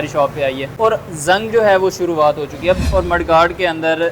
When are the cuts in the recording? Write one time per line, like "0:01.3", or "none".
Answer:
0:02.8